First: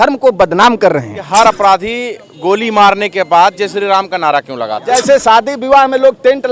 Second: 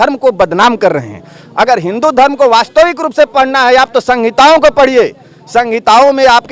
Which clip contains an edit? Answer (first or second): first